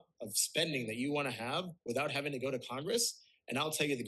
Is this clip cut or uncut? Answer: uncut